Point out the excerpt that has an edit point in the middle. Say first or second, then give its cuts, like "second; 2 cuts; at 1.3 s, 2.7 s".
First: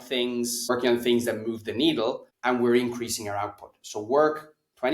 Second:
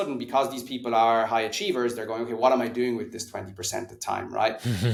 first; 2 cuts; at 0.7 s, 2.3 s